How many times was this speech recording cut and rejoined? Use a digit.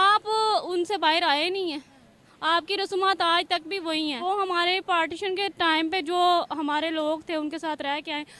1